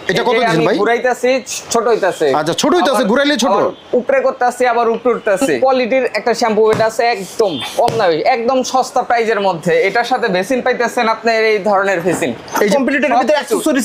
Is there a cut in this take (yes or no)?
yes